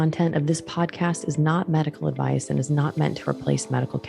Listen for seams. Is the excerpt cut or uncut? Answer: uncut